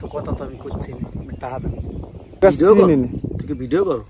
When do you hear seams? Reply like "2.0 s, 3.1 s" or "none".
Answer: 2.4 s